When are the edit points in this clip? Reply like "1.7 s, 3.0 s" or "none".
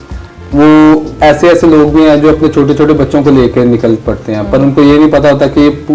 none

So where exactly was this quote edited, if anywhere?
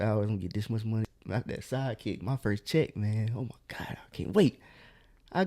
1.1 s

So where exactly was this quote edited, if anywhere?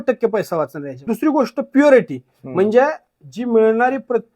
1.0 s

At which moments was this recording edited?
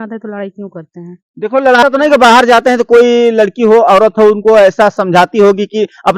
1.8 s

